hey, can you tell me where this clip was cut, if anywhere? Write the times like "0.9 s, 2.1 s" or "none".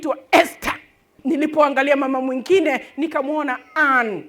1.1 s

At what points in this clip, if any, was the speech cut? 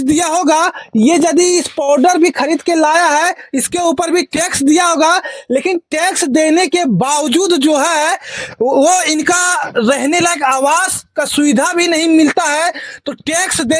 none

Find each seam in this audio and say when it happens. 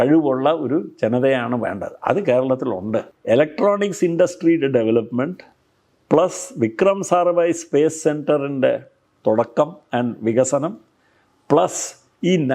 3.1 s

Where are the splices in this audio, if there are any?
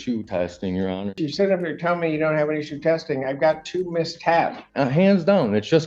1.2 s, 4.6 s

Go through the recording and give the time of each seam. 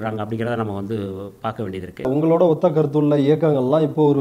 2.1 s

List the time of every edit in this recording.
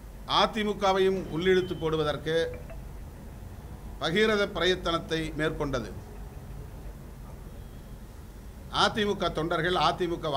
6.9 s

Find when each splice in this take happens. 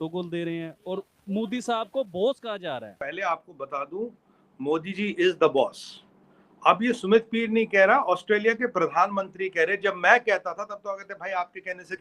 3.0 s

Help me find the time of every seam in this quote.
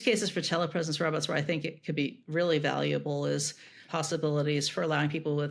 3.8 s

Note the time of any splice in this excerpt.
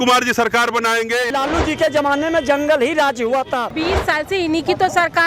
1.3 s, 3.7 s

